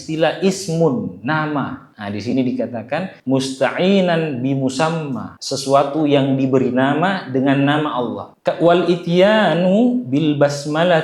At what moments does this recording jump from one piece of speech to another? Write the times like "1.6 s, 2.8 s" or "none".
none